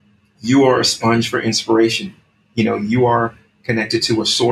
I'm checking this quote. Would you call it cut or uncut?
uncut